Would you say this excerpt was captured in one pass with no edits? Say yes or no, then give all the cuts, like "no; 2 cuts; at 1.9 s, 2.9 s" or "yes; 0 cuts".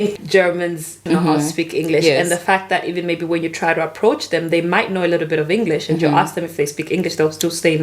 no; 1 cut; at 1.0 s